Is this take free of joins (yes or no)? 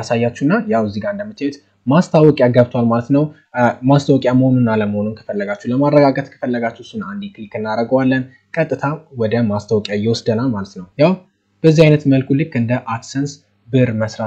no